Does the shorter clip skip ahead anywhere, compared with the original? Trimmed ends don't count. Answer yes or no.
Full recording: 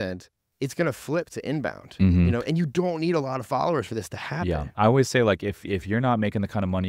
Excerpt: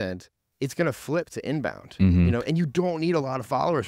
no